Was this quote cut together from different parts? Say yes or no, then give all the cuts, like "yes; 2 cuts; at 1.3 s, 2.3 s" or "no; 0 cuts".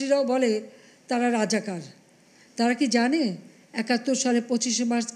no; 0 cuts